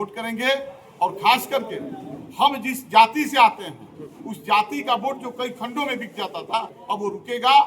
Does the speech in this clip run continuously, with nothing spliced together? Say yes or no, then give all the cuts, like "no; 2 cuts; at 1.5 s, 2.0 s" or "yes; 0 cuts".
no; 1 cut; at 6.7 s